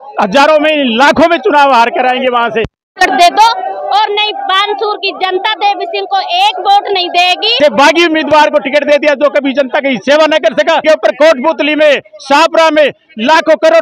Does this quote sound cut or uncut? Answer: cut